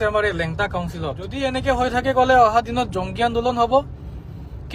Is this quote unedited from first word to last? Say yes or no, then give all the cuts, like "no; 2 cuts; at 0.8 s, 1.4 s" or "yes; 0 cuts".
no; 1 cut; at 1.3 s